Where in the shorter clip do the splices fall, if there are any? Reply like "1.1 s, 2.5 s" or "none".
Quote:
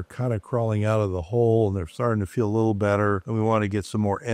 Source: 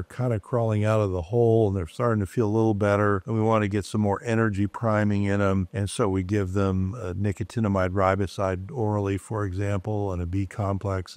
none